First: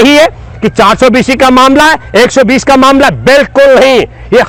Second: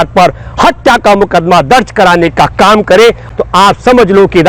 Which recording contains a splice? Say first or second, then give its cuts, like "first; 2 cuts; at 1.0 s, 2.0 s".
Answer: second; 1 cut; at 3.3 s